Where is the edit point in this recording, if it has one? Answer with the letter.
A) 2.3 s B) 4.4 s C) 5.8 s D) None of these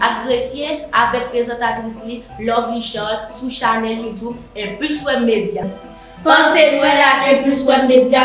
C